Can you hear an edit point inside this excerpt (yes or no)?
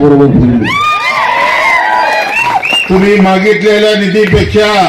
yes